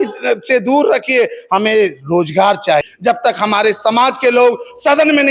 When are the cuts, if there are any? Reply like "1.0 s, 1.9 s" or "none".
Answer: 2.9 s